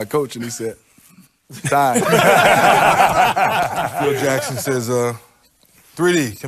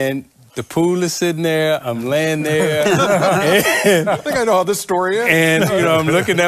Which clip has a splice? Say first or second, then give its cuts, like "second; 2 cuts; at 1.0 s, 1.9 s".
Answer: first; 1 cut; at 4.2 s